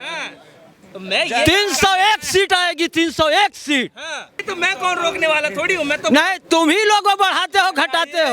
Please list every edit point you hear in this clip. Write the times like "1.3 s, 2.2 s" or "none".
4.5 s